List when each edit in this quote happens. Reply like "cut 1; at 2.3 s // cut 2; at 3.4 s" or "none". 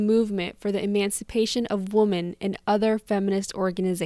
none